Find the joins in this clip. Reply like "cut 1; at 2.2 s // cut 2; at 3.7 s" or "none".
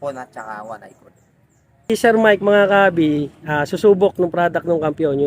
cut 1; at 1.9 s